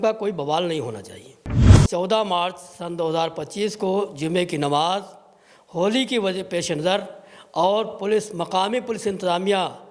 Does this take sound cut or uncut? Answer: cut